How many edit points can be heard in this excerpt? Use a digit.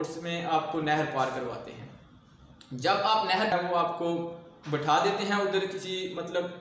1